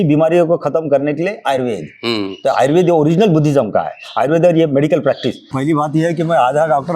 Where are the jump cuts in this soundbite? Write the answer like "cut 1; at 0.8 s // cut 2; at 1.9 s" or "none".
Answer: cut 1; at 5.5 s

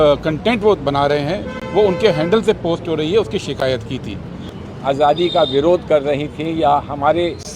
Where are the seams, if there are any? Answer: cut 1; at 4.5 s

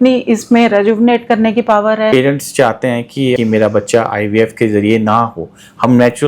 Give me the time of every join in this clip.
cut 1; at 2.1 s // cut 2; at 3.4 s

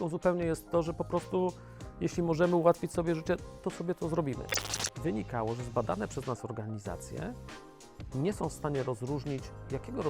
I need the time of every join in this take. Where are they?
cut 1; at 4.6 s

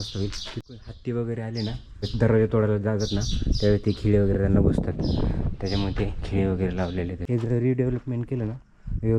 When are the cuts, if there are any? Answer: cut 1; at 0.8 s // cut 2; at 2.1 s // cut 3; at 7.2 s

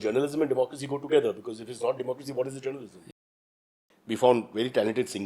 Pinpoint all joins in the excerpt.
cut 1; at 3.5 s

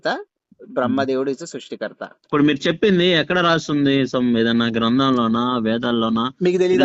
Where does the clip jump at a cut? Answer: cut 1; at 2.1 s

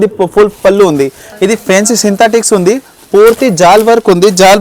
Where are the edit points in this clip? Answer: cut 1; at 1.2 s

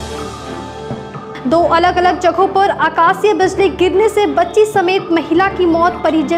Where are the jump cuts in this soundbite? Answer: cut 1; at 1.1 s

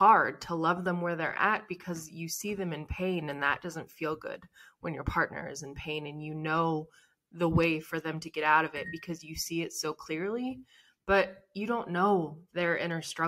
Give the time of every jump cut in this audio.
none

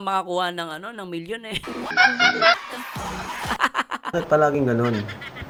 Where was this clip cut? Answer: none

